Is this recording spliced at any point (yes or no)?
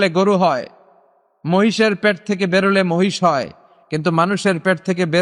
no